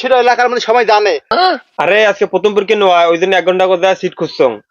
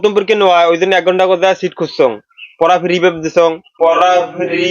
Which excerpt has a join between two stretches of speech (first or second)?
first